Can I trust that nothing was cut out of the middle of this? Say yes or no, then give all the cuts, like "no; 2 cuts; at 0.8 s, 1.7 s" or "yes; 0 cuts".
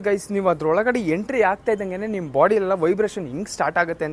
yes; 0 cuts